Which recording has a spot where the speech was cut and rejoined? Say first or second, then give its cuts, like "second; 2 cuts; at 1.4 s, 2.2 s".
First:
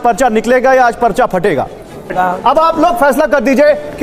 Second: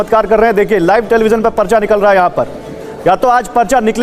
first; 1 cut; at 2.0 s